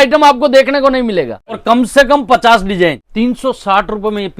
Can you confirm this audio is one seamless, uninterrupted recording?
no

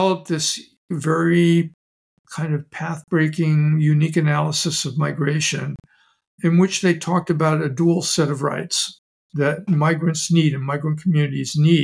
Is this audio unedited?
no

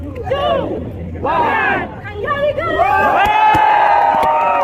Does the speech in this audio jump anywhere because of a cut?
no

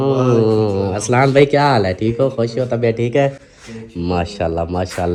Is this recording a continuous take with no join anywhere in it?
yes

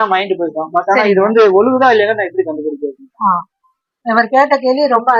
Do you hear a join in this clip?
no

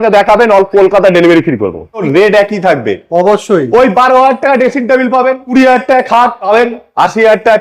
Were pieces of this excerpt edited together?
yes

